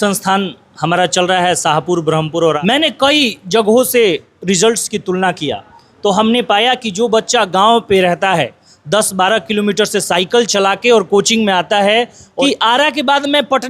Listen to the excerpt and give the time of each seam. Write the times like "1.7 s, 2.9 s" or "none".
2.6 s, 12.2 s